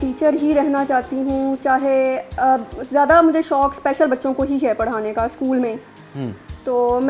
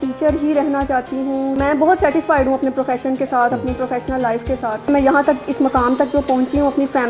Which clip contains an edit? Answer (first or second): second